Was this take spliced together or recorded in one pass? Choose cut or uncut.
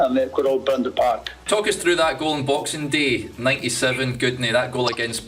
cut